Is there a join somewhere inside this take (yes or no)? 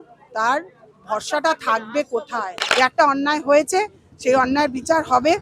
yes